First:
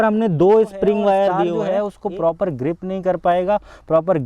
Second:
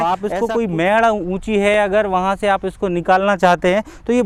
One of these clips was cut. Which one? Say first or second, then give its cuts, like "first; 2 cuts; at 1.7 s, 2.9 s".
first; 1 cut; at 1.6 s